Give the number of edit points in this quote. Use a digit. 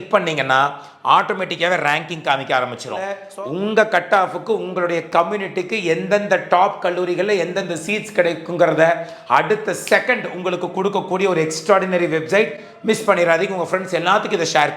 1